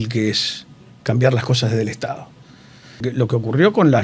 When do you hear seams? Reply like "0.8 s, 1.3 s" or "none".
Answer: 3.1 s

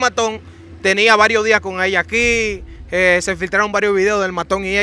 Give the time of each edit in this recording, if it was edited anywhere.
none

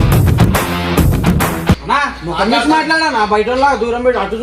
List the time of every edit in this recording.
1.8 s

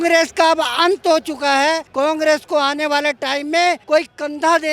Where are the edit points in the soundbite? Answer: 1.9 s, 3.8 s

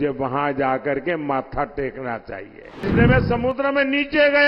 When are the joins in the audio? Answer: 2.8 s

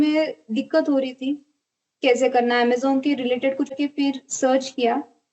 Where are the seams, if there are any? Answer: 3.7 s

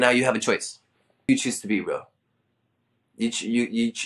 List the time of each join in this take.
1.3 s

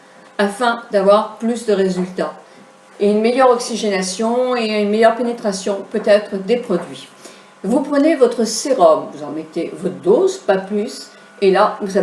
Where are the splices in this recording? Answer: 4.8 s

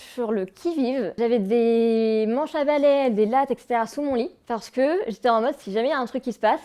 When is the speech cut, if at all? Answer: 1.2 s, 4.4 s

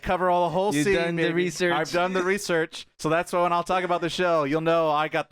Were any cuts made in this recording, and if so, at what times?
2.8 s

